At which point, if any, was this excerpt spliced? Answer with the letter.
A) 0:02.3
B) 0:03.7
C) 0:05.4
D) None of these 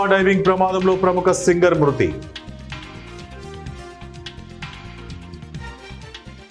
C